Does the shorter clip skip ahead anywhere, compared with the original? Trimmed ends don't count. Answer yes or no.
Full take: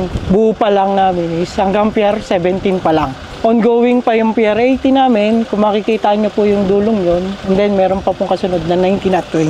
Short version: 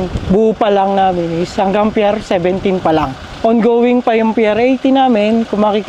no